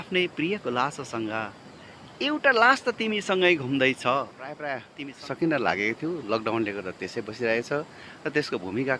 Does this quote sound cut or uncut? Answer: cut